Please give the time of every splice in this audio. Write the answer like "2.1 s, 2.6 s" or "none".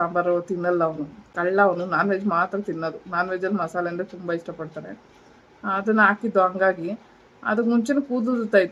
none